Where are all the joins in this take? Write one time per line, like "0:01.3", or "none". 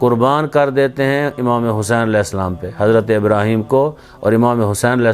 none